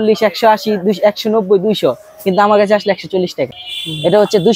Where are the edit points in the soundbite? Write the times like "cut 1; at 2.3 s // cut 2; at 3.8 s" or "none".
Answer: cut 1; at 3.6 s